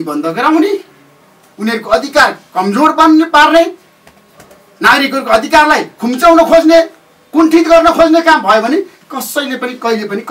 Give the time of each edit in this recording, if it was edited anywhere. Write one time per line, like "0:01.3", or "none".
none